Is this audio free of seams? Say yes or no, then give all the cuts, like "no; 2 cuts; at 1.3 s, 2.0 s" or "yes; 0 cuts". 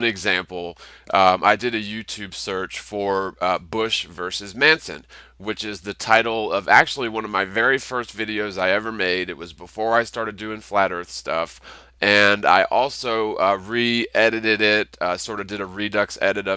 yes; 0 cuts